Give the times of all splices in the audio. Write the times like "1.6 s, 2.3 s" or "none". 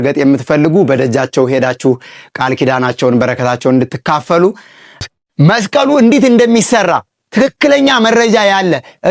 5.0 s